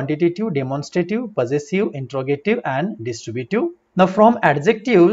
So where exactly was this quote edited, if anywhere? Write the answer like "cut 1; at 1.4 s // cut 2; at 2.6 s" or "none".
cut 1; at 3.8 s